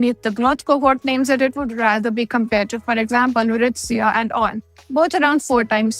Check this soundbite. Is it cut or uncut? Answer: uncut